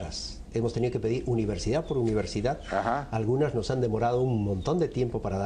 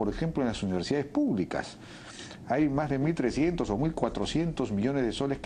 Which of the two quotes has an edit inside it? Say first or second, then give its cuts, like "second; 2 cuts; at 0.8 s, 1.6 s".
first; 1 cut; at 4.5 s